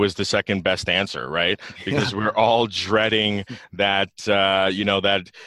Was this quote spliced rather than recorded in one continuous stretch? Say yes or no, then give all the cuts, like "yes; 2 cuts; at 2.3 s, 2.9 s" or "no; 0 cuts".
no; 0 cuts